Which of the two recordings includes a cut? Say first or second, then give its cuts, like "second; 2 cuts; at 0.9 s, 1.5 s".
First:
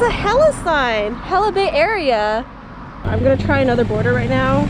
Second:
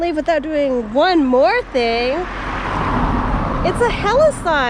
first; 1 cut; at 3.1 s